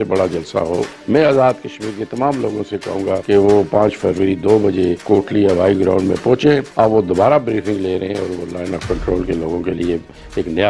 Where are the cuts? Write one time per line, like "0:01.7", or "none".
0:01.0
0:03.2
0:05.0
0:06.7